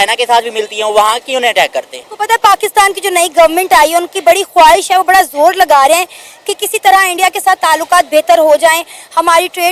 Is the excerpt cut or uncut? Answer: uncut